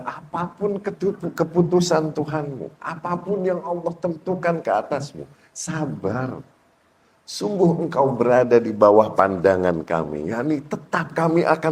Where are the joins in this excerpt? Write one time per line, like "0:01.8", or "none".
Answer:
none

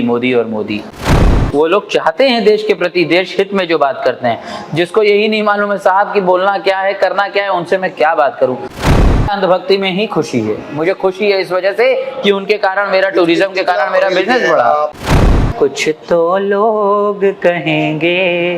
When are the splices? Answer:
0:01.0
0:09.1
0:15.1

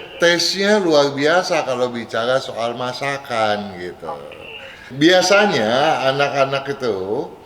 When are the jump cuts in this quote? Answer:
0:04.9

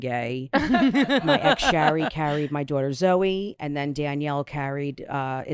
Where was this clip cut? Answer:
0:01.3

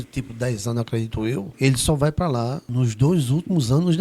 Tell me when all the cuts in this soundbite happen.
0:01.5
0:02.6

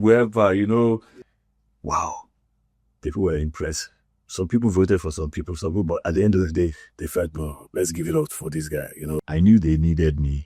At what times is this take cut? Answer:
0:01.2
0:09.2

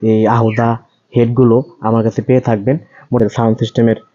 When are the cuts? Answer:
0:03.2

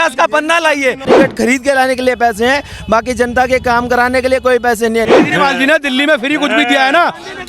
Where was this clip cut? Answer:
0:01.1
0:05.1

